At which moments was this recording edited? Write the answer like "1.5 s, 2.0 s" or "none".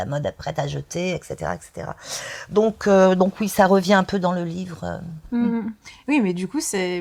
none